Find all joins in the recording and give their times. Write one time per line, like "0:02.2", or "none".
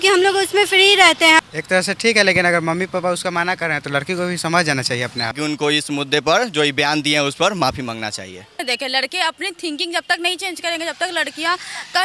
0:01.4
0:05.3
0:08.6